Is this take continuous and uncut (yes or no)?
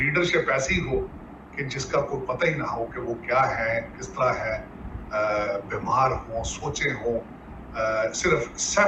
yes